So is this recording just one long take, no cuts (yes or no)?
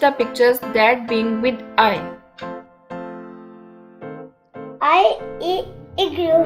yes